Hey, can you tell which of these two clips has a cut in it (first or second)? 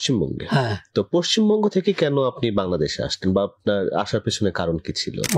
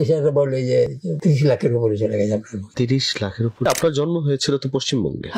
second